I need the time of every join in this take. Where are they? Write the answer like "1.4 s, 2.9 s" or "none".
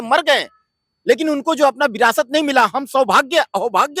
none